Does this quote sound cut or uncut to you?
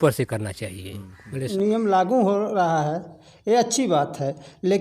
cut